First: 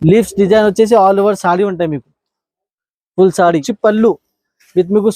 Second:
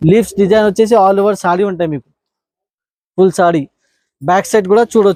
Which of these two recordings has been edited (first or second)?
first